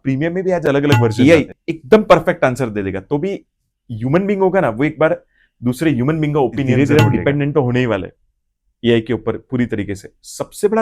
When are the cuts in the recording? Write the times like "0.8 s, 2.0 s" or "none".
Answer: 1.1 s, 6.7 s